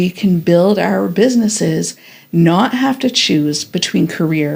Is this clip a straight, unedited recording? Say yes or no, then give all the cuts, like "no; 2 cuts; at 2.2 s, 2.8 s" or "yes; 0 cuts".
yes; 0 cuts